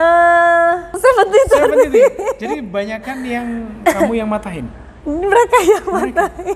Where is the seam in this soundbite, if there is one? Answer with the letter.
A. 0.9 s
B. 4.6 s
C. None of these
A